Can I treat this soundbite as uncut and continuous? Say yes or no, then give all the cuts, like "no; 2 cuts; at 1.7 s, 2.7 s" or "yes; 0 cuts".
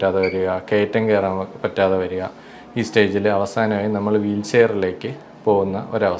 yes; 0 cuts